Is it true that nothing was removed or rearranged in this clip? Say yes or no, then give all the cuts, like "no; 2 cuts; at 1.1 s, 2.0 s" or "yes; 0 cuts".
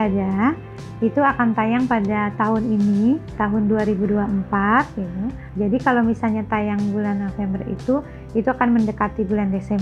no; 2 cuts; at 3.3 s, 5.4 s